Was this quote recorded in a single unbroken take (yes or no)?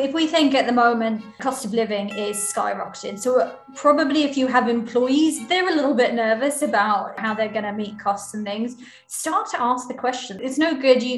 yes